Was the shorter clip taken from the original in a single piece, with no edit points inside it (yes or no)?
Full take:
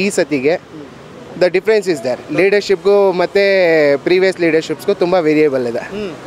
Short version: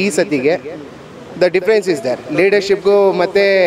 yes